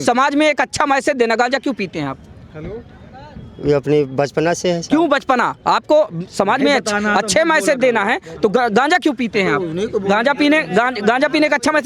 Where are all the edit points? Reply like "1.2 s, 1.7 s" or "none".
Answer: none